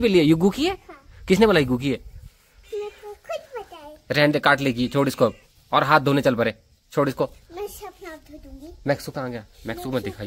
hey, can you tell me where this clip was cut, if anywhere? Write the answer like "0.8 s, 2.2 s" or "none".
none